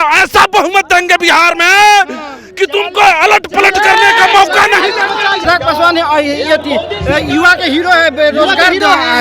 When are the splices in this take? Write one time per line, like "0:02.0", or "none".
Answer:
0:05.4

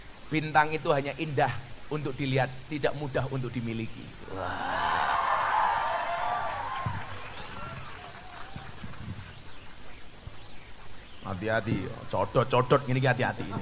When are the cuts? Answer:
none

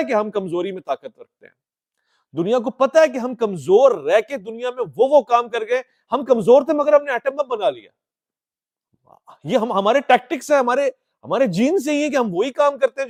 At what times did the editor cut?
none

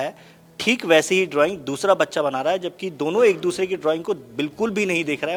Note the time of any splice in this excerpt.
none

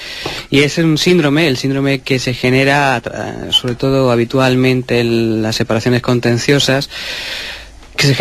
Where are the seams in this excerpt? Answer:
0:05.1

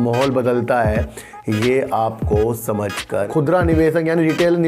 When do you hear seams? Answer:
0:03.3

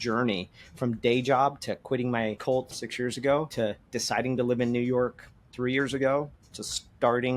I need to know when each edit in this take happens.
0:02.8
0:03.5

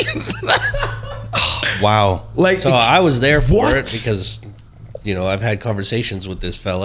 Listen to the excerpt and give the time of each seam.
none

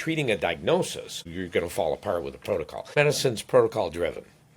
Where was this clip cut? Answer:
0:01.1
0:03.0

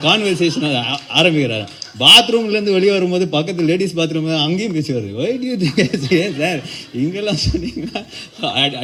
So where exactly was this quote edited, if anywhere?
none

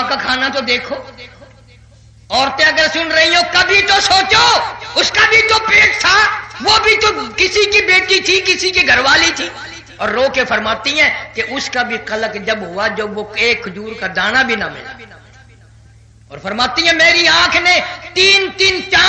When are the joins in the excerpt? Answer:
none

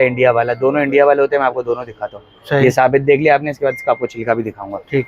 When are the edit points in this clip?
none

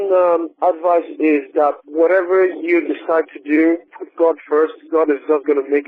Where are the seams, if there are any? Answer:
0:04.0

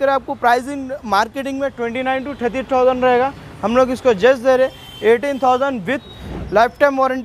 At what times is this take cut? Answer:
none

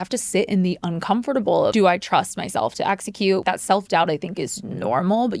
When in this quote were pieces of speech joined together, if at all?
0:01.7
0:03.4

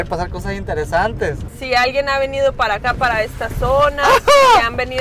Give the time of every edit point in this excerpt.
0:01.5

